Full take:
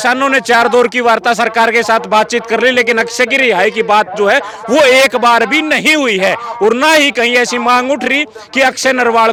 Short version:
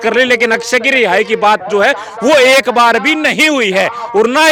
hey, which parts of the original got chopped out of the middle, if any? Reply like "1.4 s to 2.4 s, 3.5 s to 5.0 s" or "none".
none